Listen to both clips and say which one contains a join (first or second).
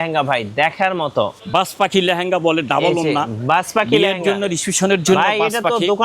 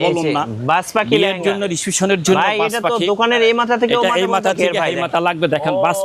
first